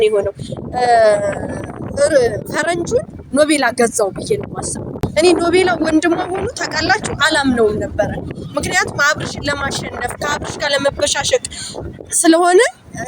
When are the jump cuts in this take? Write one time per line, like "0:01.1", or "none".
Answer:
0:04.9